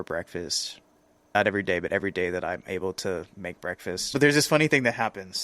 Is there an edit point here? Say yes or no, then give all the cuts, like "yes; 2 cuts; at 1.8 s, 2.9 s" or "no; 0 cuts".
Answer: yes; 2 cuts; at 1.4 s, 4.0 s